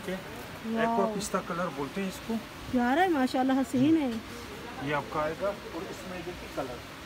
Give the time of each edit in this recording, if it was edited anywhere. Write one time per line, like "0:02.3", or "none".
none

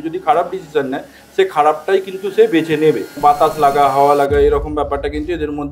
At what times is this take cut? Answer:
0:03.1

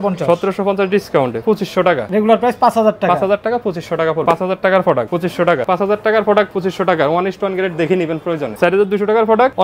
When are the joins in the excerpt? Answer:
0:01.9
0:04.2
0:05.6
0:06.5
0:08.5

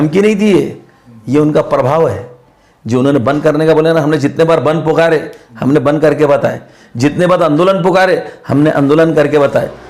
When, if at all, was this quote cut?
none

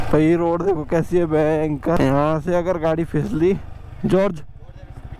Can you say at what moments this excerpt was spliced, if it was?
0:02.0
0:03.9

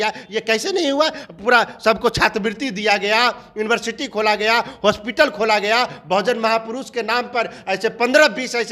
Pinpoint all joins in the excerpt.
none

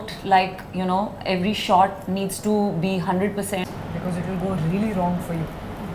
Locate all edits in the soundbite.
0:03.7

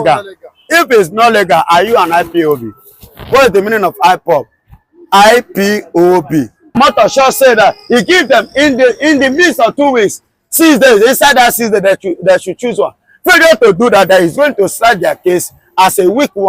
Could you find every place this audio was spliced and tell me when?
0:06.8

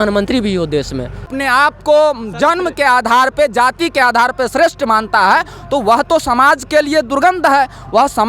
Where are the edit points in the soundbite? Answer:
0:01.2

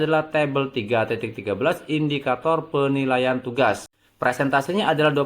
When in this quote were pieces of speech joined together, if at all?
0:03.9

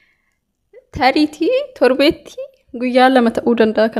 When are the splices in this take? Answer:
none

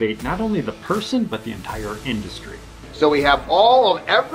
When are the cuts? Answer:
0:02.8

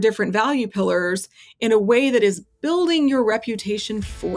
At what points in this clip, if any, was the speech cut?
none

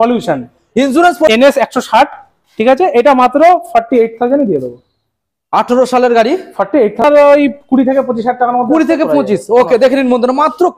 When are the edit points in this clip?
0:01.3
0:07.0

